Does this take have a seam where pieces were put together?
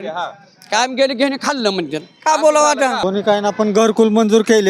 yes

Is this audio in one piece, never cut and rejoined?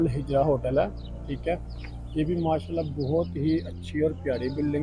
yes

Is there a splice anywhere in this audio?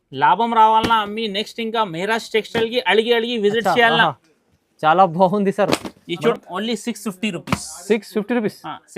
yes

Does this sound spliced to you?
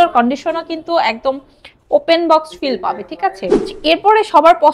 yes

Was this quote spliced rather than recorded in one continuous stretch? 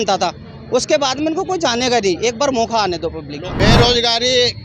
yes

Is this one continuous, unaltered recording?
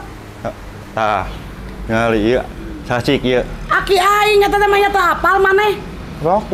yes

